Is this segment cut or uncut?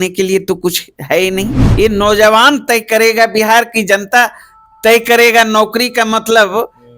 cut